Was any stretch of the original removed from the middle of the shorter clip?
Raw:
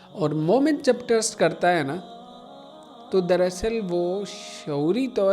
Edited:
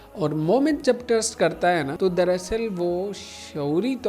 yes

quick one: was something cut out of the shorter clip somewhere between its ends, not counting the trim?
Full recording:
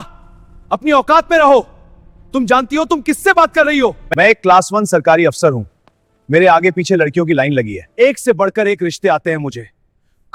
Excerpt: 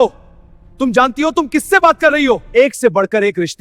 yes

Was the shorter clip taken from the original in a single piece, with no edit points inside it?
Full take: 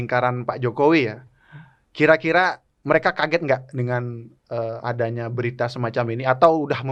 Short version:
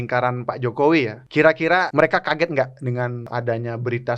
no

